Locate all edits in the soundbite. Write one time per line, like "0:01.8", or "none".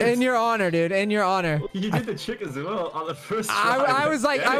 0:01.7